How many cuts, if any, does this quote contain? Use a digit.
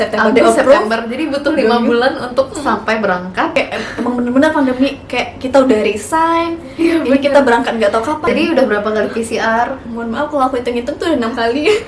2